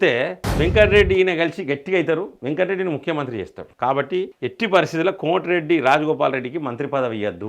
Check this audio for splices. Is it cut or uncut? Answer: uncut